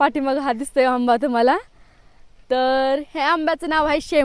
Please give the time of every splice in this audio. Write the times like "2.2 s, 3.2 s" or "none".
none